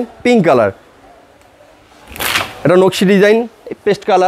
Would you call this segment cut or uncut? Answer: uncut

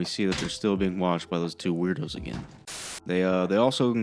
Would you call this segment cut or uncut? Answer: cut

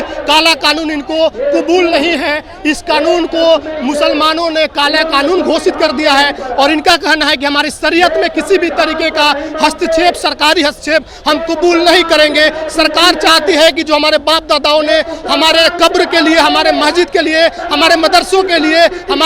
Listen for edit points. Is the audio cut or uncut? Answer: uncut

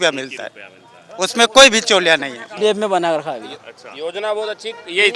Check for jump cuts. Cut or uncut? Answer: cut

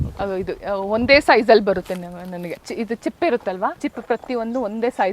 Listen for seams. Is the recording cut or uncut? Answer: cut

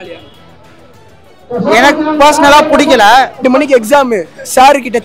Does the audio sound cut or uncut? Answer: cut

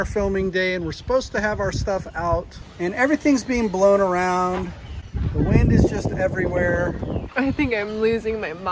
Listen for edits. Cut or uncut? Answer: cut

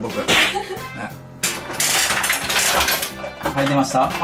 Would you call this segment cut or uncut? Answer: cut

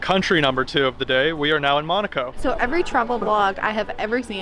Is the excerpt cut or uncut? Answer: cut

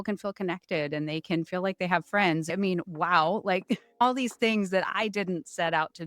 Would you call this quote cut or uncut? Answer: cut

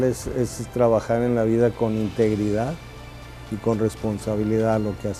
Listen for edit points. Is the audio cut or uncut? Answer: uncut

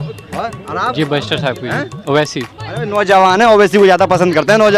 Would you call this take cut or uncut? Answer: uncut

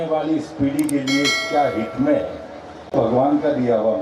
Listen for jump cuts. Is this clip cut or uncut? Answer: cut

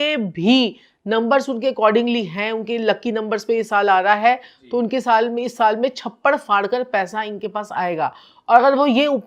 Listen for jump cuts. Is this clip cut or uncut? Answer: uncut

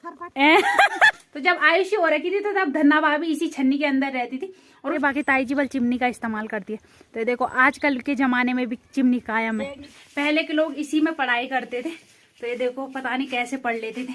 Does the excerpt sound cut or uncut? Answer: cut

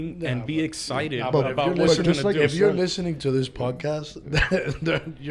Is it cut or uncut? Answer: uncut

